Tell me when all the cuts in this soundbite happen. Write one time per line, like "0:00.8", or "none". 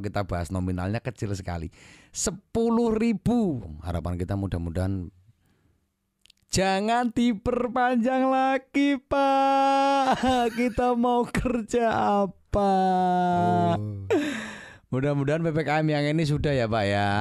0:03.7

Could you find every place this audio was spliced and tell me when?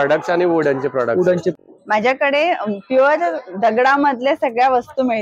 0:01.6

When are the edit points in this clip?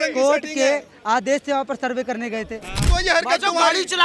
0:02.9

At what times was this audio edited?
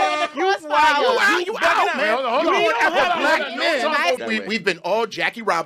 0:04.2

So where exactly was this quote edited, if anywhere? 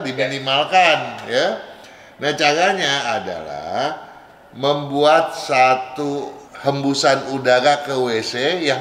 none

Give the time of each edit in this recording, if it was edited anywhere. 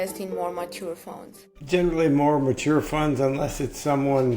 0:01.6

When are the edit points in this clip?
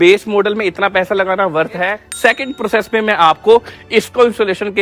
0:02.0

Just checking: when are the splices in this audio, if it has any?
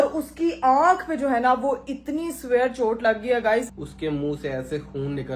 0:03.7

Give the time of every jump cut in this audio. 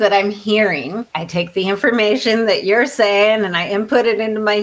0:01.2

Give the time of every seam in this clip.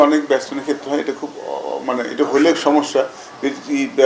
none

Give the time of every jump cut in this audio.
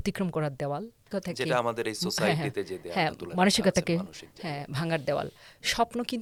none

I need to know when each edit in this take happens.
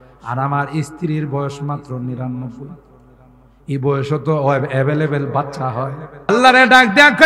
0:06.3

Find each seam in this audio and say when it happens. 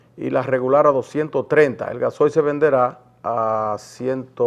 none

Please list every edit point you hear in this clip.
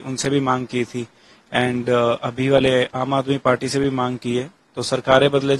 none

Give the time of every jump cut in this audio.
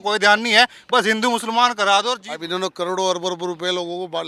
0:02.3

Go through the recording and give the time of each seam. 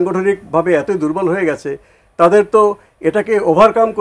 none

